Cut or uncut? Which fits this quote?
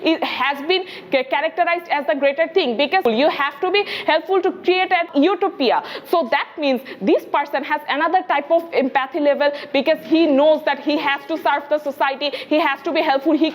cut